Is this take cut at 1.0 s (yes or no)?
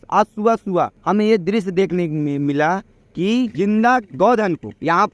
yes